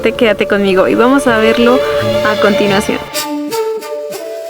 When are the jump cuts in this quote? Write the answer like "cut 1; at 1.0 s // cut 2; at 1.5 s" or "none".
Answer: cut 1; at 3.1 s